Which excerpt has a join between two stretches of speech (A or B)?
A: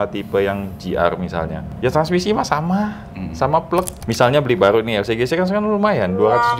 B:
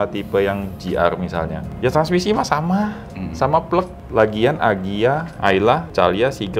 A